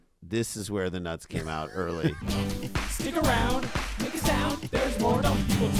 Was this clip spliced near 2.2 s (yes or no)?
yes